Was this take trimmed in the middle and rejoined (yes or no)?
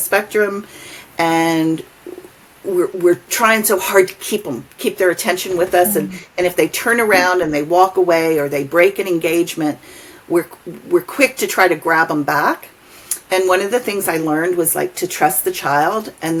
no